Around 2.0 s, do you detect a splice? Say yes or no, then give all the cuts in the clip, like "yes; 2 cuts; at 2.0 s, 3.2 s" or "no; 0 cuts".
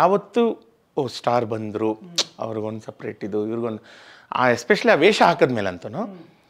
no; 0 cuts